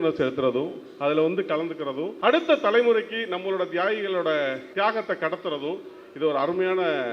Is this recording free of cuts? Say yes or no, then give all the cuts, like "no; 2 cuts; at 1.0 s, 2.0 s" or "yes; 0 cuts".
no; 2 cuts; at 2.1 s, 4.7 s